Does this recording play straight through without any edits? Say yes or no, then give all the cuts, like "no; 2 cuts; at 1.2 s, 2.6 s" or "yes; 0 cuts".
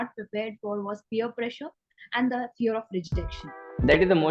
yes; 0 cuts